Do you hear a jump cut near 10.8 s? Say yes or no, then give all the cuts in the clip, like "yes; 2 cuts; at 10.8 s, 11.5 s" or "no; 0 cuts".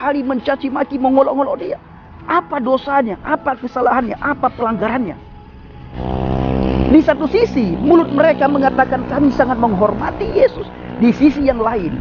no; 1 cut; at 5.9 s